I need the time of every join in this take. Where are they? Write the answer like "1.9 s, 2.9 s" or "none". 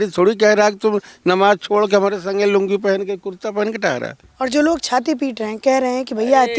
4.2 s